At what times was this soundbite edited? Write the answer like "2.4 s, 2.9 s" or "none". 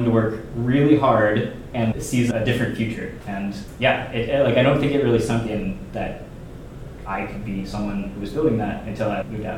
none